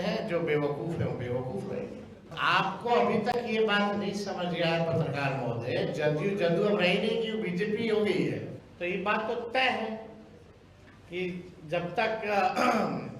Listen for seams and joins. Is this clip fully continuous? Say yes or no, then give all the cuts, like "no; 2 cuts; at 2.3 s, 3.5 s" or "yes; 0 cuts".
no; 2 cuts; at 2.3 s, 8.6 s